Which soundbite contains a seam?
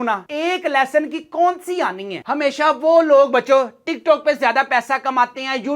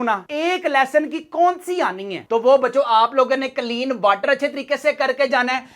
first; 1 cut; at 2.2 s

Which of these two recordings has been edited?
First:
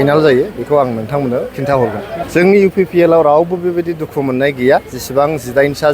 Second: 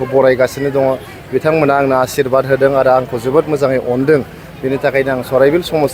first; 1 cut; at 2.2 s

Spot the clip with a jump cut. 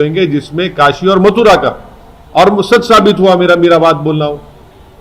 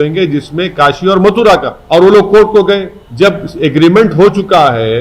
second; 2 cuts; at 1.7 s, 3.0 s

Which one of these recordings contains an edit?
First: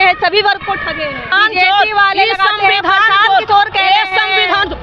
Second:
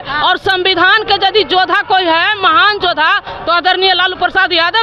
first; 1 cut; at 1.3 s

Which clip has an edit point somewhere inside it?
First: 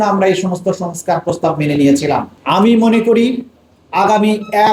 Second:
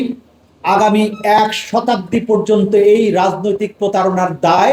first; 1 cut; at 2.3 s

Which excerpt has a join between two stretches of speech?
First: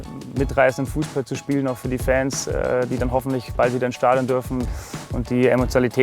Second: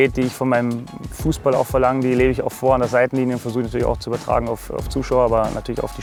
first; 1 cut; at 4.6 s

